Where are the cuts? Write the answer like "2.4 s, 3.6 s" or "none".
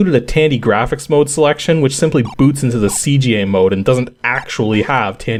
none